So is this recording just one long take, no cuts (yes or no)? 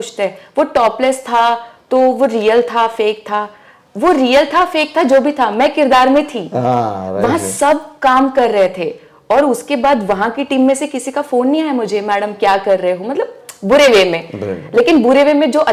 yes